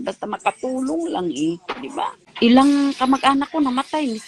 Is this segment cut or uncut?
cut